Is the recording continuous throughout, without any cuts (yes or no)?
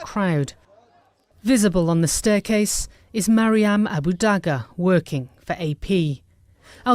no